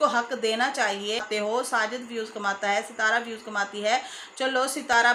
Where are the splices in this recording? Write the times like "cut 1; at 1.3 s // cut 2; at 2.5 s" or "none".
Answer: cut 1; at 1.2 s